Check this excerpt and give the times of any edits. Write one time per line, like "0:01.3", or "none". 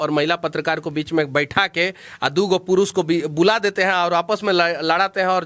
none